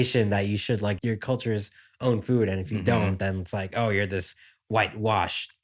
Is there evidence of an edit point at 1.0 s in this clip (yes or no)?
yes